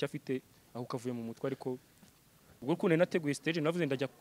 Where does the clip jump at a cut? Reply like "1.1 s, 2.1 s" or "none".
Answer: 2.6 s